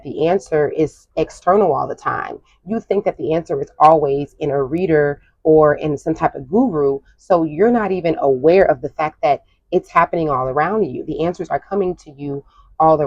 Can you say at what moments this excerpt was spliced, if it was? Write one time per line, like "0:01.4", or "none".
none